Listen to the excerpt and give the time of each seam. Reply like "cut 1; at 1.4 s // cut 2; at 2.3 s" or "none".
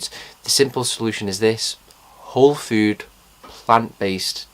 none

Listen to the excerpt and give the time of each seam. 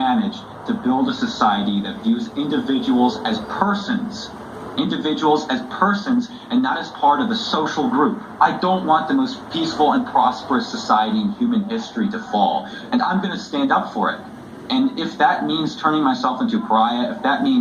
cut 1; at 8.3 s

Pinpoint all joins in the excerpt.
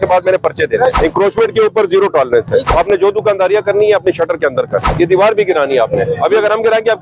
cut 1; at 1.0 s // cut 2; at 2.7 s // cut 3; at 4.9 s

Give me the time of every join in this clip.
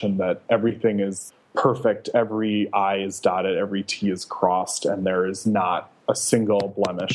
cut 1; at 1.3 s

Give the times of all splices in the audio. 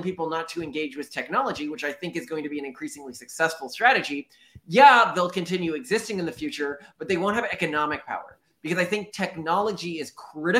none

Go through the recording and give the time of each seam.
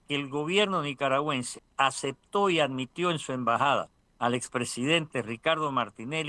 cut 1; at 1.6 s // cut 2; at 4.0 s

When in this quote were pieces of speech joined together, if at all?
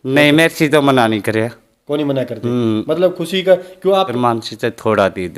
cut 1; at 4.1 s

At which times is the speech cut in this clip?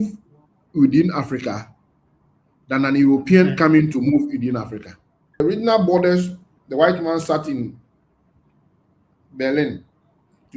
cut 1; at 5.4 s

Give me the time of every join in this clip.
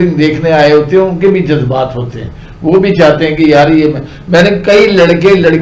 none

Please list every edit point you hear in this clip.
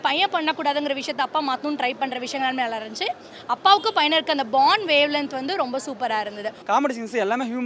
cut 1; at 6.6 s

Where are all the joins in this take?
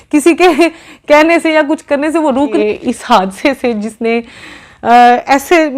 cut 1; at 2.6 s

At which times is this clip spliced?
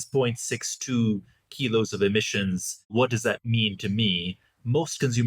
cut 1; at 2.9 s

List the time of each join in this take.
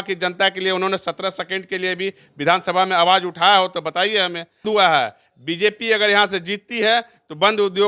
cut 1; at 4.6 s

